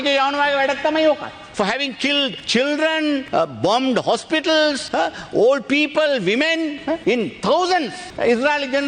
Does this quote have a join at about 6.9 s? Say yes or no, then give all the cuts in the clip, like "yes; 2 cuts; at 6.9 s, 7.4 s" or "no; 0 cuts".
yes; 6 cuts; at 1.4 s, 2.4 s, 3.2 s, 4.8 s, 6.9 s, 8.0 s